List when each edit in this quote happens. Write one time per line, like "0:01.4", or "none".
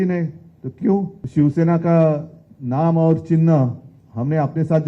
0:01.2